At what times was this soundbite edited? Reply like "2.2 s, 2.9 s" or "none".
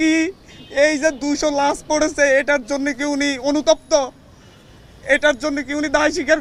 none